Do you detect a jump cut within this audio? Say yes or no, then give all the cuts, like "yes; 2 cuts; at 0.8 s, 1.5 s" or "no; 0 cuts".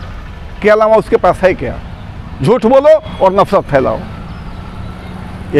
no; 0 cuts